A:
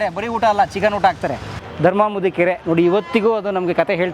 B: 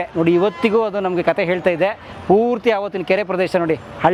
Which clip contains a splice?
A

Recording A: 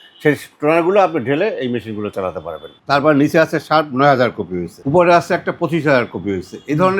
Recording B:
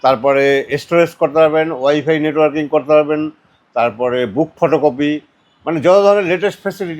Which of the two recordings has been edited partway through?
A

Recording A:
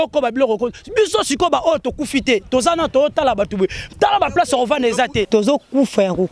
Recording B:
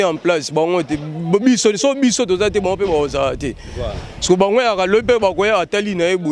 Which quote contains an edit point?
A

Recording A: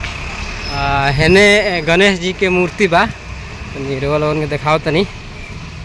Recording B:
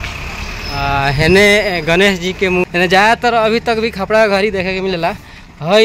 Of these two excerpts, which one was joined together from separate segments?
B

